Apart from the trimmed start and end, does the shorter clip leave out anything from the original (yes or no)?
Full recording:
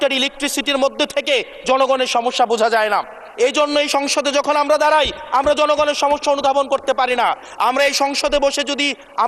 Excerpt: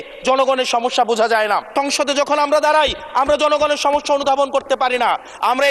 yes